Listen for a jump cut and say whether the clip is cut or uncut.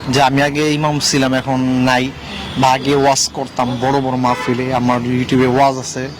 uncut